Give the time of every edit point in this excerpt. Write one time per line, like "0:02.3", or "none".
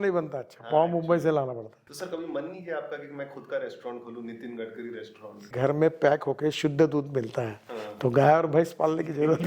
0:01.7
0:05.5